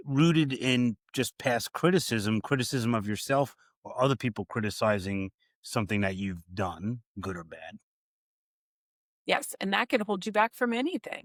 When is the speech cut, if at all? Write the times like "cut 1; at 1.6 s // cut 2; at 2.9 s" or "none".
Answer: none